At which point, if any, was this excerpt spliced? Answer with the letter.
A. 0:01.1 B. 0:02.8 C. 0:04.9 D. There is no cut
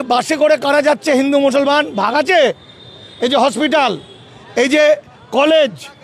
D